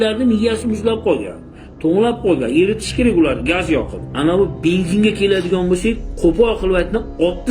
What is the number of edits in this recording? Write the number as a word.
one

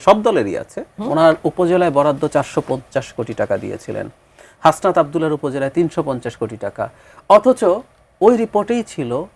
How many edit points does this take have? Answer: one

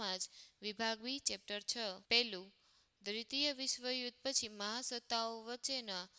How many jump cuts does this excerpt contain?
one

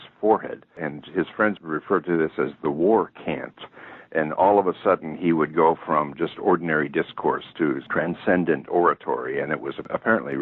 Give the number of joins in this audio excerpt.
one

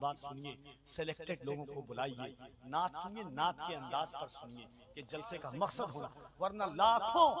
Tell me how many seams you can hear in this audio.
zero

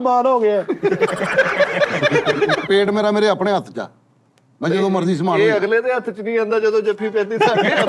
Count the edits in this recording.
one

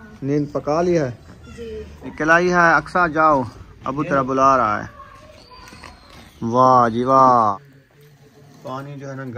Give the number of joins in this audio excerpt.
two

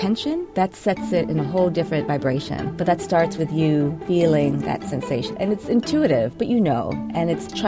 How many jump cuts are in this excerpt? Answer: two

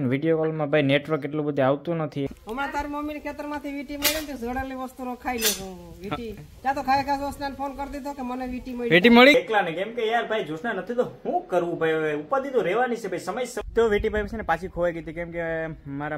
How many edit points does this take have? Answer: three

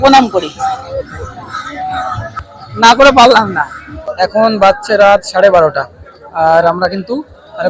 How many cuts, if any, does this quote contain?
two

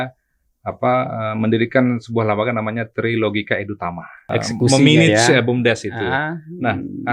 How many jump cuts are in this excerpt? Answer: one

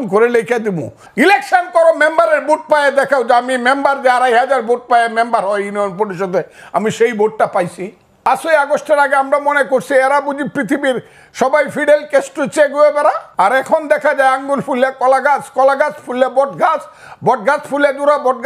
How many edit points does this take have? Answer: three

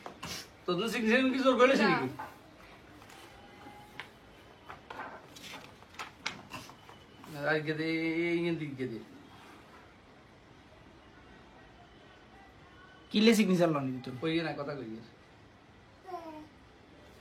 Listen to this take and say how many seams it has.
zero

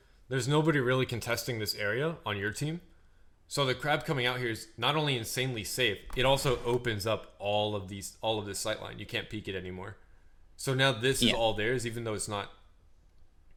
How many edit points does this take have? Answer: zero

